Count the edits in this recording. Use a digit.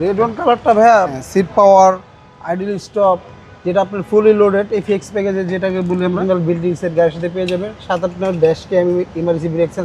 2